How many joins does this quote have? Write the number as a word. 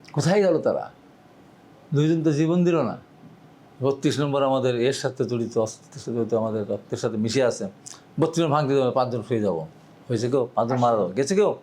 zero